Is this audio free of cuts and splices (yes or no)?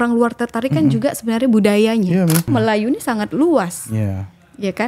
no